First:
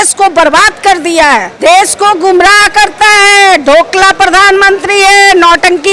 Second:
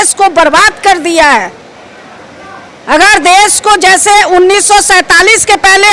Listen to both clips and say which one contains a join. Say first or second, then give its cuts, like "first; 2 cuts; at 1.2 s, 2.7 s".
first; 1 cut; at 1.5 s